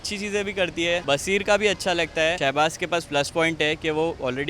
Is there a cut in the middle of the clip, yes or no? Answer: yes